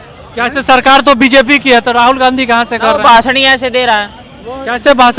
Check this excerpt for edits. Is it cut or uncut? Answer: uncut